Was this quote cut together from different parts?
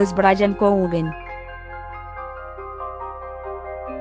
no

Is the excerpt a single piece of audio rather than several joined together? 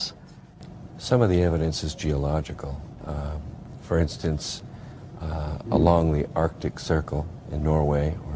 no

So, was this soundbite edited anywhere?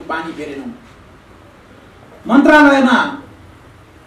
no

